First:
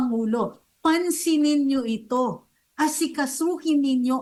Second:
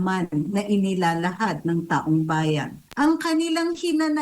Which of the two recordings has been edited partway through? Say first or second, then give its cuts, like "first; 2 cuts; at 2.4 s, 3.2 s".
second; 1 cut; at 2.8 s